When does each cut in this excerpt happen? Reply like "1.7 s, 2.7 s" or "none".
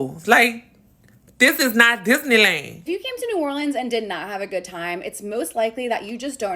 3.0 s